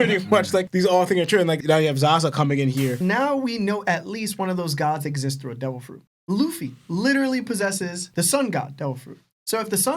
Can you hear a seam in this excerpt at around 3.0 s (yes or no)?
yes